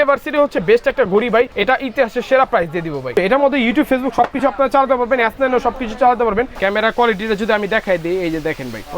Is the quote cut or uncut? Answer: cut